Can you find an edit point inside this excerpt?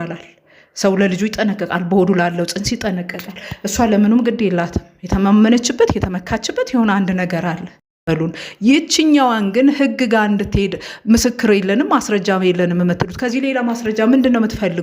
yes; 1 cut; at 8.0 s

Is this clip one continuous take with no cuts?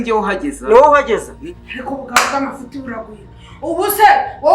no; 1 cut; at 1.4 s

